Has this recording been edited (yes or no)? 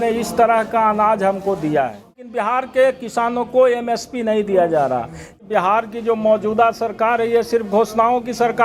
yes